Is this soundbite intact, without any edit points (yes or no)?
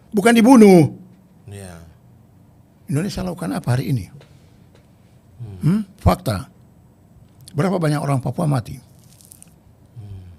yes